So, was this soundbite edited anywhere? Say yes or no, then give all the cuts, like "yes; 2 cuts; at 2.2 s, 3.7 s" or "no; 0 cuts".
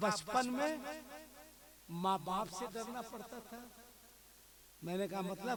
no; 0 cuts